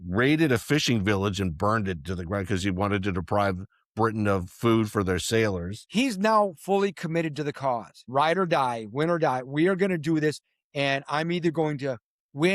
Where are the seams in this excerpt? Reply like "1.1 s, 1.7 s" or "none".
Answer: 5.7 s, 7.9 s